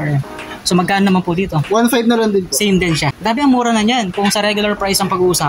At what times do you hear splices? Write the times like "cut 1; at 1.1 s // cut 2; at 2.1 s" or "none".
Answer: cut 1; at 3.1 s